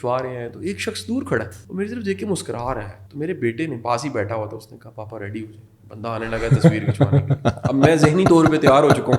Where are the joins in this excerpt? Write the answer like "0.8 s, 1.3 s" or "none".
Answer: 1.6 s, 3.0 s